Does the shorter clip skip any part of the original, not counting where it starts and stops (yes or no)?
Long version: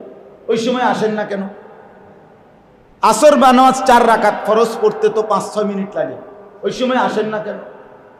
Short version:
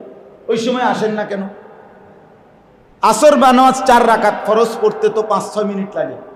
no